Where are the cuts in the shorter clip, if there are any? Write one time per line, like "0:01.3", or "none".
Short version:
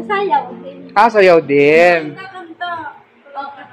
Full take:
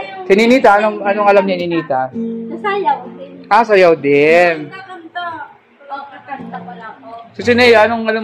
none